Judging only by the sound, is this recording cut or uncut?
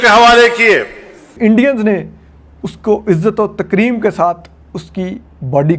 cut